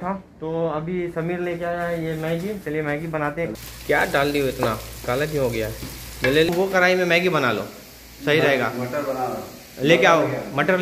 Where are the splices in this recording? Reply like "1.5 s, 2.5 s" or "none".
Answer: 3.5 s, 6.5 s